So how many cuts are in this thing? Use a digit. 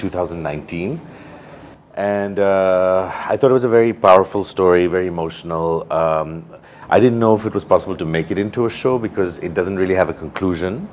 0